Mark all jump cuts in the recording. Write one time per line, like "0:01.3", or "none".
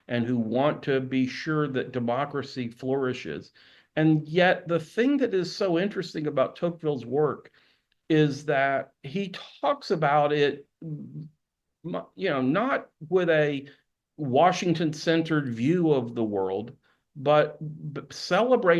none